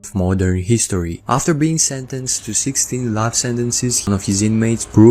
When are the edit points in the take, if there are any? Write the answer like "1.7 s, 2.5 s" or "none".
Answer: 4.1 s

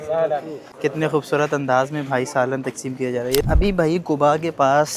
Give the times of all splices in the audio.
3.4 s

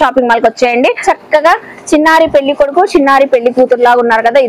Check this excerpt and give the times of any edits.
1.0 s

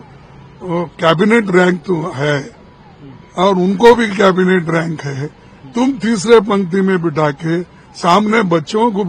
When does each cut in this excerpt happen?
none

